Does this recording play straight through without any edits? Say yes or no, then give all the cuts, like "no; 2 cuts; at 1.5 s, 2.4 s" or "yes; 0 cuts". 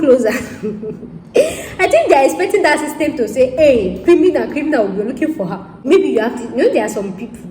no; 1 cut; at 5.8 s